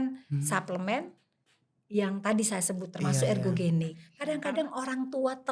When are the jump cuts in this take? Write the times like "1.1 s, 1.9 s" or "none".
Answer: 4.0 s

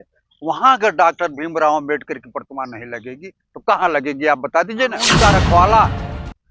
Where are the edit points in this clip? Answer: 5.0 s

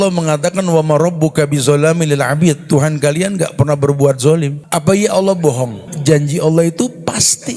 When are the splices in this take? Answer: 4.6 s, 5.9 s

